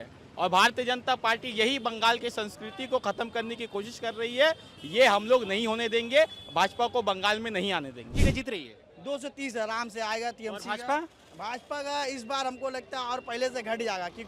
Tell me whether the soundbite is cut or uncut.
cut